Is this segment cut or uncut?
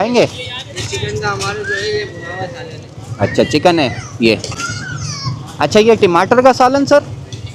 uncut